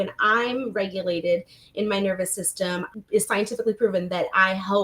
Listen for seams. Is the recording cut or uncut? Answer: cut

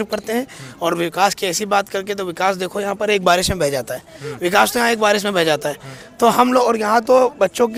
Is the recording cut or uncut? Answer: uncut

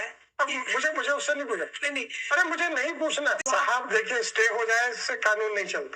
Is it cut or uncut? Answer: cut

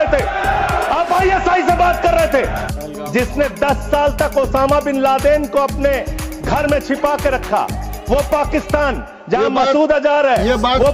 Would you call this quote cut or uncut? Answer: cut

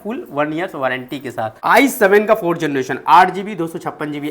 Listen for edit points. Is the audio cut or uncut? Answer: cut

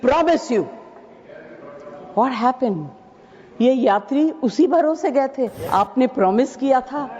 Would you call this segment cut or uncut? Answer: cut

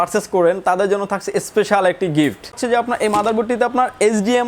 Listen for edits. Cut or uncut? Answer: cut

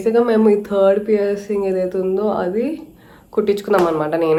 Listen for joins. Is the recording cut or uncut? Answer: uncut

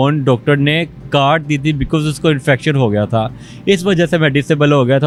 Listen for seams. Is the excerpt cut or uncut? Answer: uncut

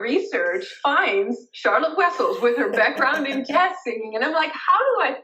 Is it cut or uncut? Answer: uncut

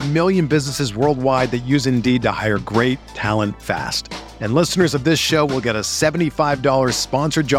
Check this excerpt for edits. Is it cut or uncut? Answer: uncut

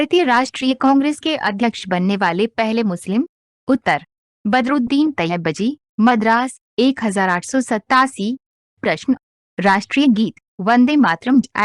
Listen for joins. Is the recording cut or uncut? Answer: uncut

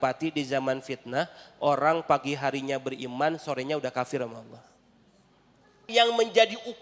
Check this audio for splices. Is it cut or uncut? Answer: cut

